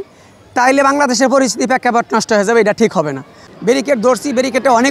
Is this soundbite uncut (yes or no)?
no